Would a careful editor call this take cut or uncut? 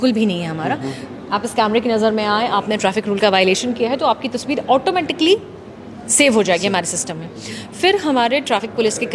cut